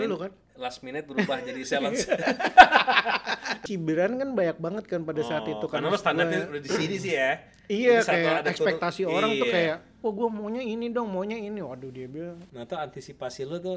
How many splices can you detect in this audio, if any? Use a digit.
2